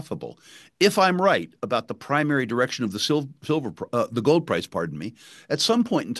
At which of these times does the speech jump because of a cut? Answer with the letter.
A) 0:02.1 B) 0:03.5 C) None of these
C